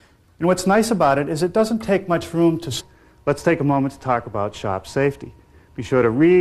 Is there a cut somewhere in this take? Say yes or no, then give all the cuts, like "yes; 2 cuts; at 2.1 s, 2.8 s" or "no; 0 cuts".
no; 0 cuts